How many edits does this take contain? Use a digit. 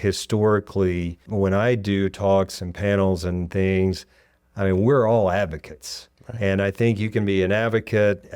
1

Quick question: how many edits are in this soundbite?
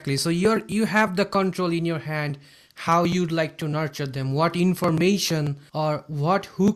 1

